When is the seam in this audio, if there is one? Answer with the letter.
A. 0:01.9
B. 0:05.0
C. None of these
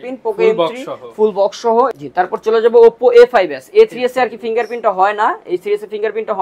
A